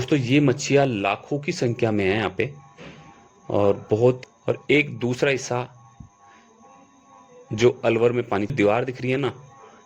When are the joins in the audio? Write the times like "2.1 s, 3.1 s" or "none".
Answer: 4.2 s, 8.5 s

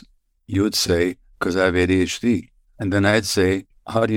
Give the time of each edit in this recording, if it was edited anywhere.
none

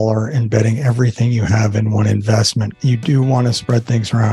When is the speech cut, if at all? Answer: 2.7 s

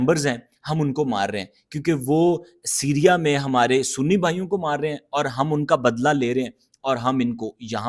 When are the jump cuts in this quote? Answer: none

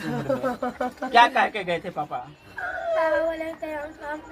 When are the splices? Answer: none

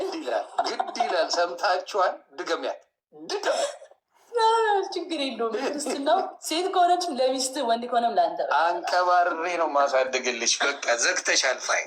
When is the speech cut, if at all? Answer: none

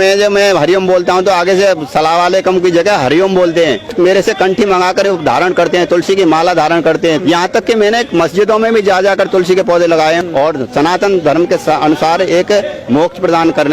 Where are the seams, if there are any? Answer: 3.9 s, 7.2 s, 10.2 s

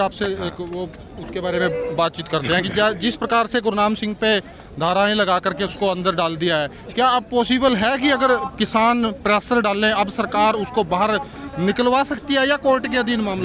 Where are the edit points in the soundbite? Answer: none

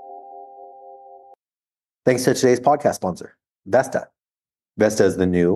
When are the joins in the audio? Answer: 1.3 s

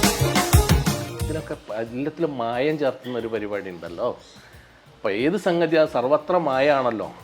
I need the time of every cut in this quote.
1.2 s

